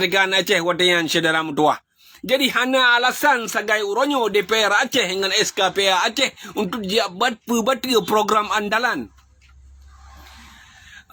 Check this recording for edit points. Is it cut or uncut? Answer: uncut